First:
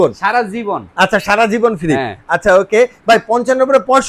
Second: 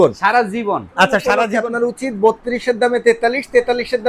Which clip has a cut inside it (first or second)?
second